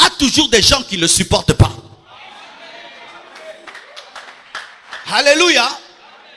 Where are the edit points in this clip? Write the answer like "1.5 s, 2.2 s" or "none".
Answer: none